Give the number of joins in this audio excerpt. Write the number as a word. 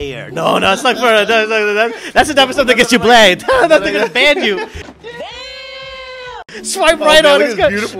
two